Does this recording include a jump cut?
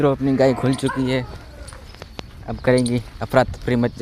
no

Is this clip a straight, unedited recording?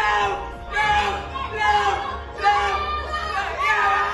yes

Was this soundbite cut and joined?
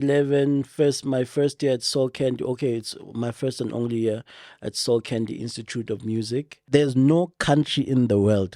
yes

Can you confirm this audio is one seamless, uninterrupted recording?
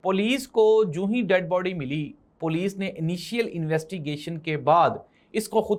yes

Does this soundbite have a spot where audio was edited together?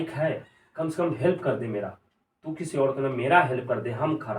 no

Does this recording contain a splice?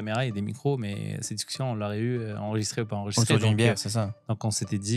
no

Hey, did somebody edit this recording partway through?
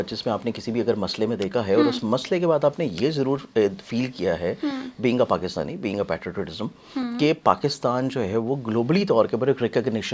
no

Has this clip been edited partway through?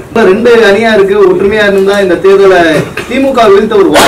no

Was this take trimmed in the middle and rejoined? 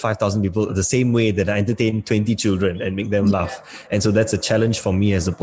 no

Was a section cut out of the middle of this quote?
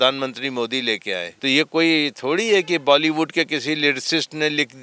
yes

